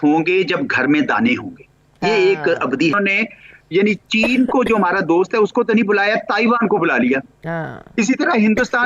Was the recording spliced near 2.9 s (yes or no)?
yes